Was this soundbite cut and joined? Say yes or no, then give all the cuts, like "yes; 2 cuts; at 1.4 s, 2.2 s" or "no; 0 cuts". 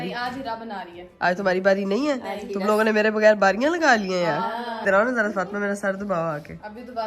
no; 0 cuts